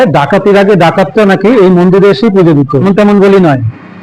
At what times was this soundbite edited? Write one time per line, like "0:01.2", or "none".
0:02.8